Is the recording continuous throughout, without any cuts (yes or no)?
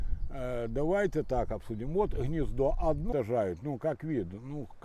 no